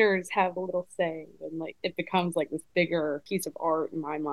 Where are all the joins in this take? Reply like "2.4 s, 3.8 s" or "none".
1.7 s, 3.2 s